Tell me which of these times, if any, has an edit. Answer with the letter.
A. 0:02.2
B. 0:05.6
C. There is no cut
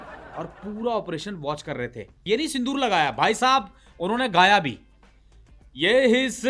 A